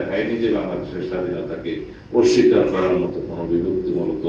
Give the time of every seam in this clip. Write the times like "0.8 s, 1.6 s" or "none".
none